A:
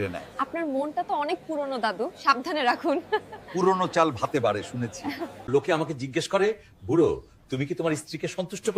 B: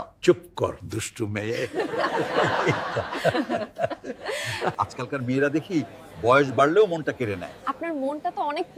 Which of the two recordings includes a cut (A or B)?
A